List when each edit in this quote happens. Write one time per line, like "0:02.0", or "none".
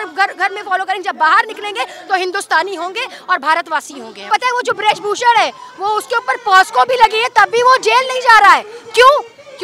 0:04.2